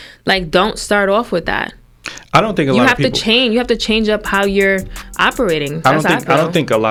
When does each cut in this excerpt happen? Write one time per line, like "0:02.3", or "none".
none